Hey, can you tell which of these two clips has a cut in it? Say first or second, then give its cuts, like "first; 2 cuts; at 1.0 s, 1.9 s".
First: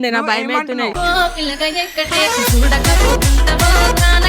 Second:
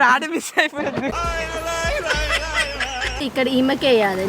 second; 2 cuts; at 1.0 s, 3.2 s